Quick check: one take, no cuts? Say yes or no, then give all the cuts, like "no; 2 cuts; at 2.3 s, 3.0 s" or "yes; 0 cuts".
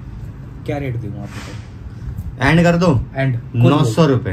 yes; 0 cuts